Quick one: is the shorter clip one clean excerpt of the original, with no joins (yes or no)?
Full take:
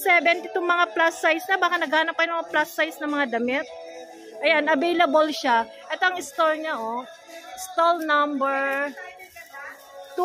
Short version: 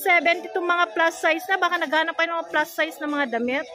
yes